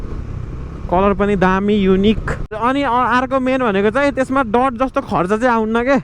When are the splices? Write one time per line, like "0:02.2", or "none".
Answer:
0:02.5